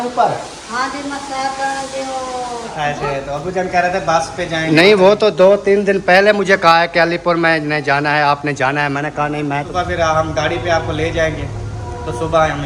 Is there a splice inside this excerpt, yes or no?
yes